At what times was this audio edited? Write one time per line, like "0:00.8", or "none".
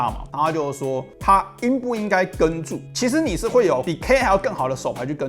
0:02.8